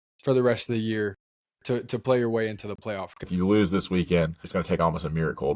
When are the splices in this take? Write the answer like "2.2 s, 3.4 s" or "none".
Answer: 3.3 s, 4.4 s